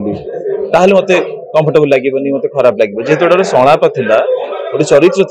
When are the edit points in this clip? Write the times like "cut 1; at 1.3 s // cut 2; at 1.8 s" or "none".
none